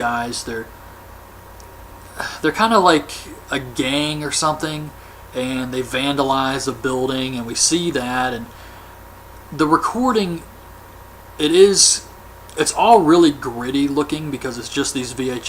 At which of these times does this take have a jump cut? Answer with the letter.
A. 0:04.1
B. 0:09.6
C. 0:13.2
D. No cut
A